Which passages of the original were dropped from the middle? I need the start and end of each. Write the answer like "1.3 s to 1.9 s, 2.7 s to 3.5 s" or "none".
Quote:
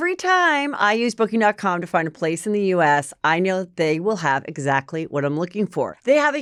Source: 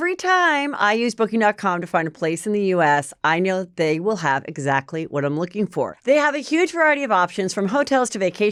none